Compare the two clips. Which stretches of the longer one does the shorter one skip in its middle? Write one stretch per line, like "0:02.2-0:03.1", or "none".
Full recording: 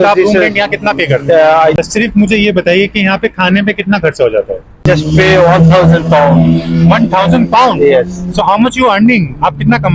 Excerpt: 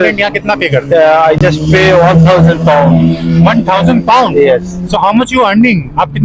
0:01.7-0:04.8